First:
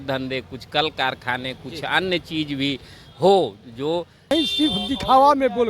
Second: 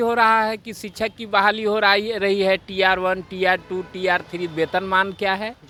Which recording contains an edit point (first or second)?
first